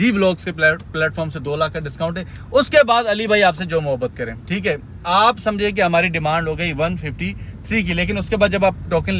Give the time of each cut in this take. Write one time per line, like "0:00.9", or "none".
none